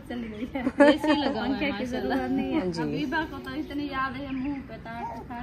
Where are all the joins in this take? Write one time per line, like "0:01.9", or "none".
0:02.7